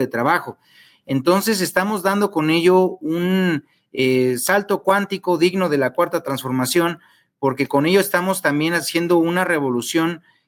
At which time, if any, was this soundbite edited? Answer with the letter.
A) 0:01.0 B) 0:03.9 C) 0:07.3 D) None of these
D